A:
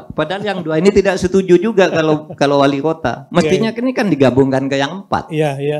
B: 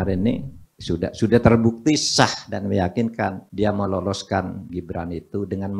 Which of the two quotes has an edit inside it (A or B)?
B